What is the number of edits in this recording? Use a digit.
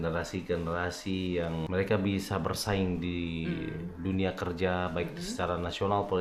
1